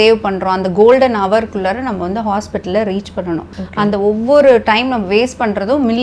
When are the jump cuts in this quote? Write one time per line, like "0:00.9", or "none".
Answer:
0:03.6